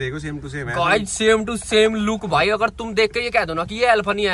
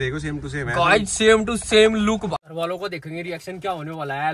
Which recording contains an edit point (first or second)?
second